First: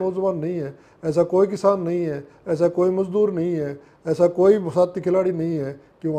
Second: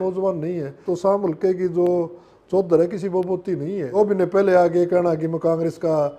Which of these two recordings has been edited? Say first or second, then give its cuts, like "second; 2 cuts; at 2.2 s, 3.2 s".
second; 2 cuts; at 0.9 s, 3.9 s